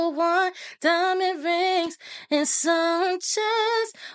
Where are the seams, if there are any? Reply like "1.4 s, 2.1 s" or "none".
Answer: none